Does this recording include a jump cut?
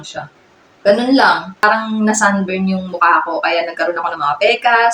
yes; 1 cut; at 1.6 s

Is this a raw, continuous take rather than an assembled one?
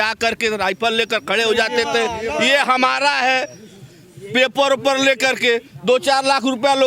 yes; 0 cuts

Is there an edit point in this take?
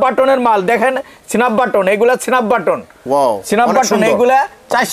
no; 0 cuts

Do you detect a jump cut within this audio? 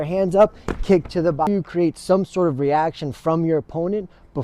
yes; 1 cut; at 1.5 s

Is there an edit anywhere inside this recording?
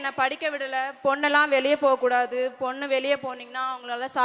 no; 0 cuts

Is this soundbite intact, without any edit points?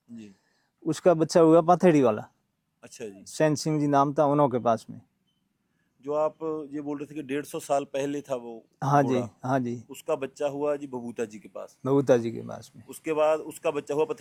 yes; 0 cuts

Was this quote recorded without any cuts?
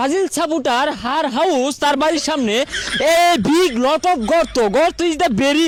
yes; 0 cuts

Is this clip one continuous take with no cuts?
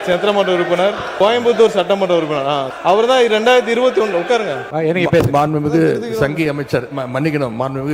no; 3 cuts; at 1.1 s, 2.7 s, 4.6 s

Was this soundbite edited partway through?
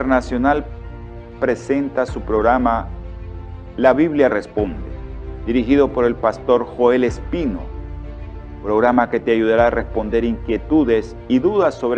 yes; 1 cut; at 1.7 s

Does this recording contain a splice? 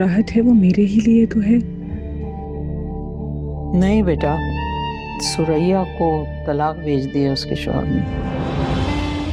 no; 0 cuts

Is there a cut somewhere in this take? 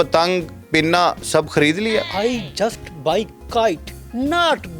yes; 1 cut; at 2.1 s

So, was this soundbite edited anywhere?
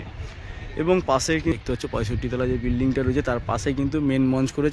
yes; 1 cut; at 1.5 s

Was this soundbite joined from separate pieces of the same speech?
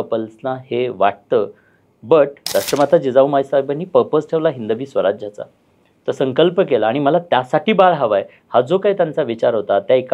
yes; 1 cut; at 2.4 s

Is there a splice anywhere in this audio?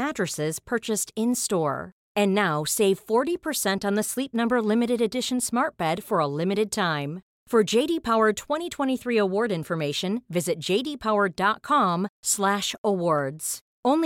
no; 0 cuts

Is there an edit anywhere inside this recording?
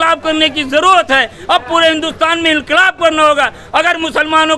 no; 0 cuts

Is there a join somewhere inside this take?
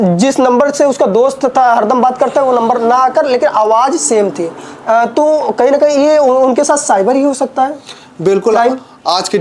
no; 0 cuts

